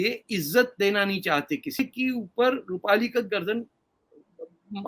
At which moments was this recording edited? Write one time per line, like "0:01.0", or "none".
0:01.8